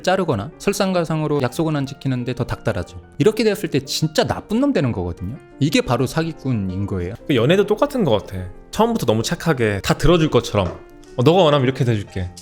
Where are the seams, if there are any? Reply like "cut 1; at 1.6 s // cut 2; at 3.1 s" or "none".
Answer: cut 1; at 1.4 s // cut 2; at 7.1 s // cut 3; at 9.8 s